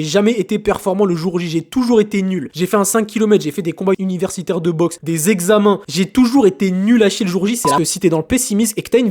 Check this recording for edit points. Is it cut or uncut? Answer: cut